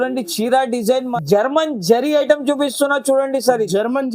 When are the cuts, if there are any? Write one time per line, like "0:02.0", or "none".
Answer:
0:01.1